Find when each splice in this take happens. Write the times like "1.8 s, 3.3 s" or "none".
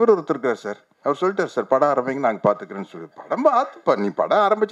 none